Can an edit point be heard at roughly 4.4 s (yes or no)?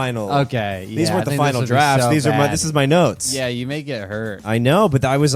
yes